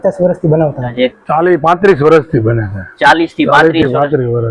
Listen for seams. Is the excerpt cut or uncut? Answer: cut